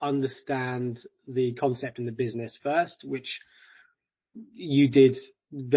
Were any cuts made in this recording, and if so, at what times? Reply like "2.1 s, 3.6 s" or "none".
none